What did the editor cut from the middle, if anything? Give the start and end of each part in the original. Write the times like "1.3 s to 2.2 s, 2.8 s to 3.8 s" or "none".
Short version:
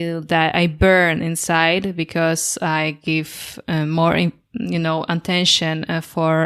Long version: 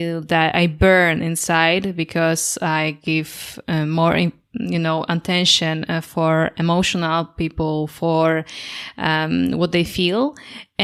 none